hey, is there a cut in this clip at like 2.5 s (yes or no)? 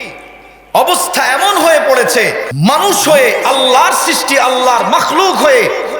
yes